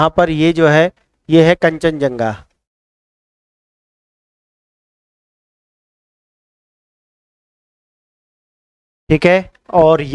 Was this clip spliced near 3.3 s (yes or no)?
no